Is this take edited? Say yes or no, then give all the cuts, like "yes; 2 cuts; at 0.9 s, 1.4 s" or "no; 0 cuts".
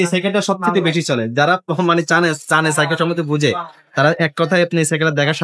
no; 0 cuts